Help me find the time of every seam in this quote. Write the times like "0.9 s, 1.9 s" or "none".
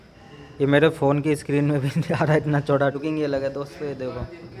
2.9 s